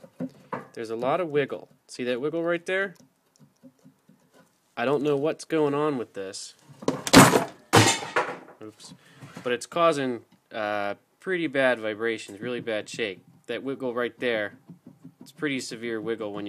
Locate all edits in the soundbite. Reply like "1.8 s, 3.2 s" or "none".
12.5 s